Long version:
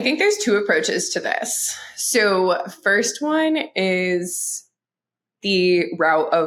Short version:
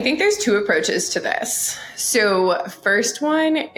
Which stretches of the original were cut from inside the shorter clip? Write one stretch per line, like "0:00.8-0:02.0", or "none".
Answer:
none